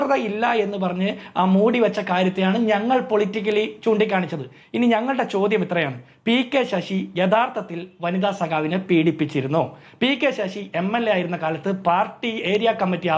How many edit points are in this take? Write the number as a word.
zero